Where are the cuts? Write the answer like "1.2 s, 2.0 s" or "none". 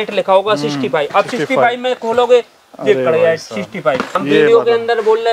4.1 s

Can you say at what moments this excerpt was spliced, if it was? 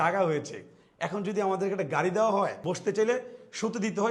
2.8 s

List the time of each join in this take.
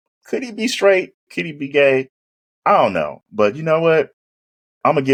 none

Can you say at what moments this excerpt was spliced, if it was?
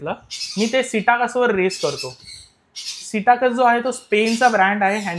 none

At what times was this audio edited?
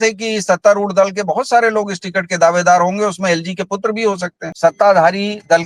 4.4 s

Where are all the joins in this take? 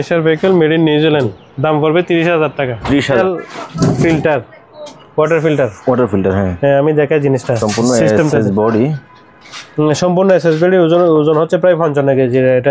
3.2 s

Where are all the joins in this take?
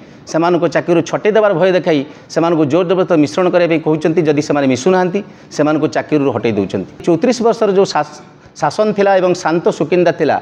7.0 s

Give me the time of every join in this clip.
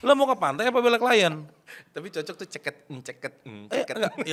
none

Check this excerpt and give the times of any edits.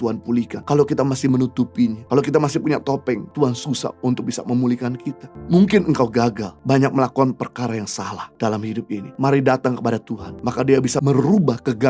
11.0 s

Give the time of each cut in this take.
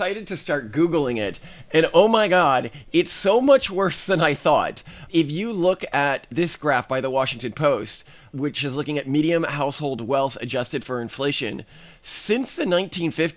none

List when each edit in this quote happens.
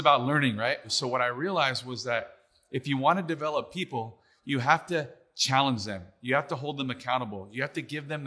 0.9 s

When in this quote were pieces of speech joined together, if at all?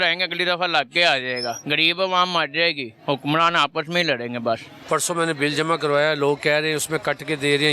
1.6 s, 2.9 s, 4.7 s

